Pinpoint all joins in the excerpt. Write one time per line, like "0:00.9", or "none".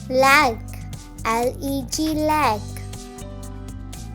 0:02.6